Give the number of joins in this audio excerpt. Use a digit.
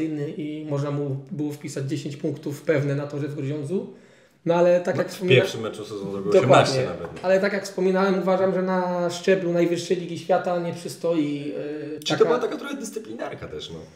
1